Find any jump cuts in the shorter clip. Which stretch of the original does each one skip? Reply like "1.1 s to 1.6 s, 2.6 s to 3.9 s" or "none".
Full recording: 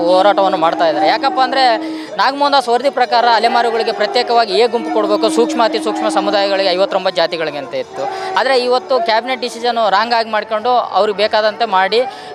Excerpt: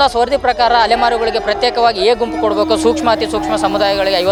none